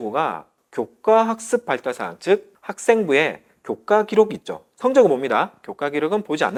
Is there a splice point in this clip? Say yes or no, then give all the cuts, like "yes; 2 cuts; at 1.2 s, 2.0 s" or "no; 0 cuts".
no; 0 cuts